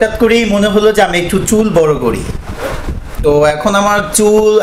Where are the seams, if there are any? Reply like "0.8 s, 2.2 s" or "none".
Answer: none